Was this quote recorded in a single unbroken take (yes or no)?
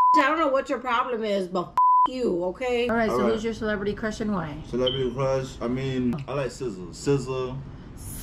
no